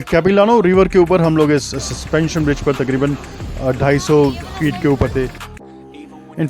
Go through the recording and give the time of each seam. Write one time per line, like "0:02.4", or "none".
0:05.4